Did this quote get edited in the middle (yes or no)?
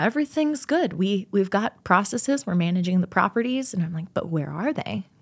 no